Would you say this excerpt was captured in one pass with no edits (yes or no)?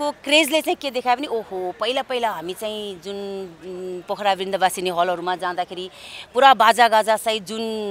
yes